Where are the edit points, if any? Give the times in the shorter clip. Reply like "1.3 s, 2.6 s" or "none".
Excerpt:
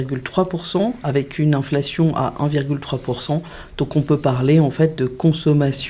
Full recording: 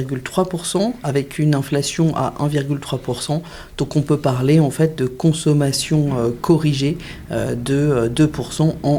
none